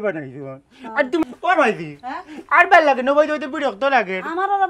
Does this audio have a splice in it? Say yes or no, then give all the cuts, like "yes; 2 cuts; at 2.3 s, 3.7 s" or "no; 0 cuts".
yes; 1 cut; at 1.2 s